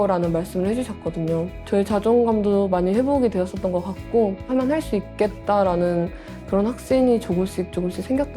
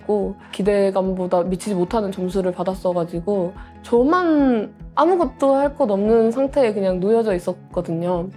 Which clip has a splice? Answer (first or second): first